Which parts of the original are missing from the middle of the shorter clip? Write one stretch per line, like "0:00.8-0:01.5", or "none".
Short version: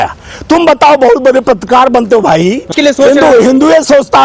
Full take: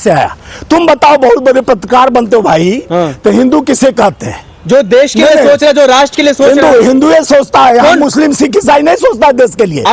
0:02.9-0:06.1